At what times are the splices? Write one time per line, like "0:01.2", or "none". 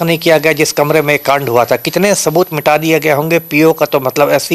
none